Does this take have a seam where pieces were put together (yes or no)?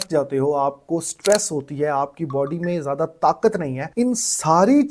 yes